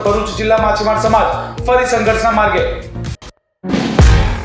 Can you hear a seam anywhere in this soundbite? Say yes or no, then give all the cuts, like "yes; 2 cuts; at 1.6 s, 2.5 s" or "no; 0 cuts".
yes; 1 cut; at 3.1 s